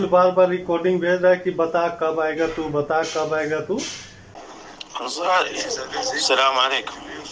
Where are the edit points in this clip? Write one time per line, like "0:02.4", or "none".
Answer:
0:04.3